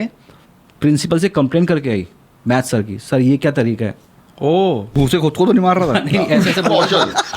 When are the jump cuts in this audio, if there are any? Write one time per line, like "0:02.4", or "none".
0:04.9